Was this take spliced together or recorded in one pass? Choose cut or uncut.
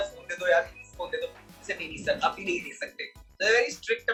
uncut